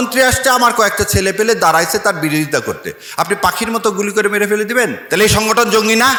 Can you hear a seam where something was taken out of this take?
no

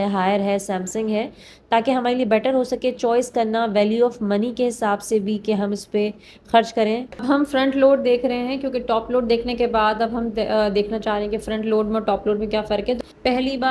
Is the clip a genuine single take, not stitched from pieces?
no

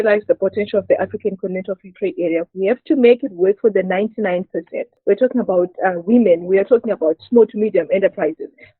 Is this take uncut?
no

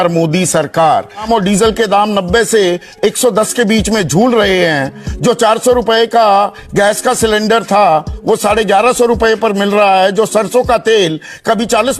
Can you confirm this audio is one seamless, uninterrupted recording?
no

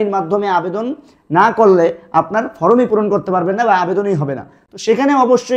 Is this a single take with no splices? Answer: yes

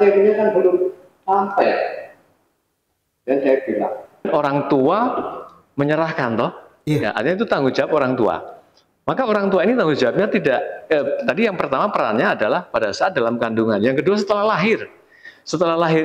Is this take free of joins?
no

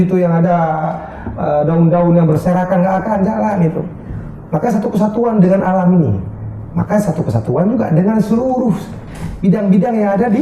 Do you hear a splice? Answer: no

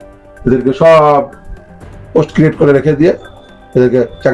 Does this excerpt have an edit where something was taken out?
no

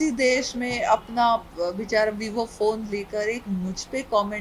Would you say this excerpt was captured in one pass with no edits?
yes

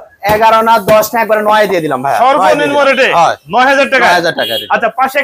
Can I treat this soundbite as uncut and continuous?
yes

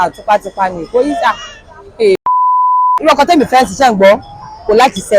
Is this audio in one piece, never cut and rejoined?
no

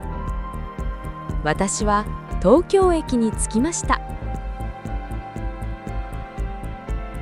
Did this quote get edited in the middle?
yes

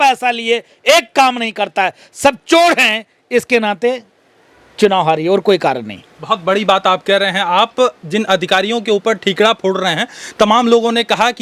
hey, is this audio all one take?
yes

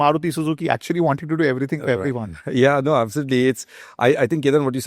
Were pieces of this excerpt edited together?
no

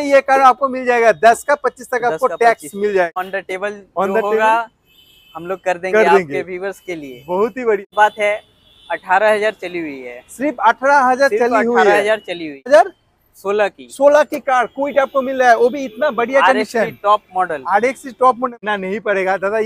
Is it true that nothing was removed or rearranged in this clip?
no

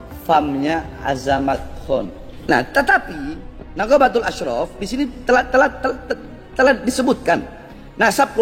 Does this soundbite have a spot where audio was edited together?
yes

